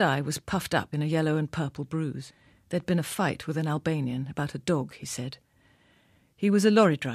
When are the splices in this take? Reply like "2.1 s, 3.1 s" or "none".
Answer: 1.4 s